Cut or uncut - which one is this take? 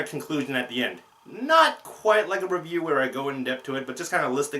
cut